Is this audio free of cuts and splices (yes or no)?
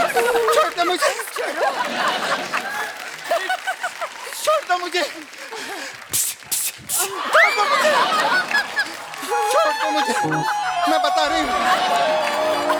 yes